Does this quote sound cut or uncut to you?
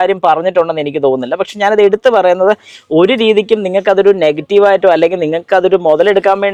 uncut